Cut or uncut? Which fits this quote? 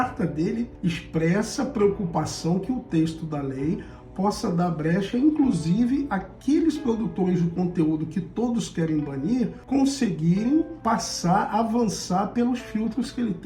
uncut